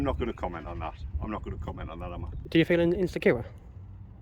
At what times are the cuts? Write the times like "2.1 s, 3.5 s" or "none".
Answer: 2.5 s